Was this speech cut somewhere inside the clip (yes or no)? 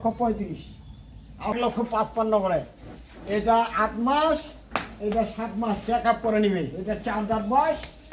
yes